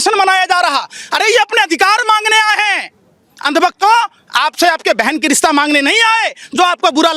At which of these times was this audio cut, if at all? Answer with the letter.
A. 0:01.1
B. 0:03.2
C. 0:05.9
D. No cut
D